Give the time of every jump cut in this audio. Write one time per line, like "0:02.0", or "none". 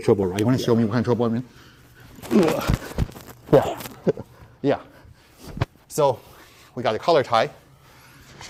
none